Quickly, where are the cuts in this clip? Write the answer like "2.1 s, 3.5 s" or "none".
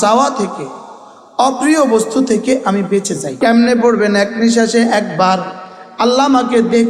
3.3 s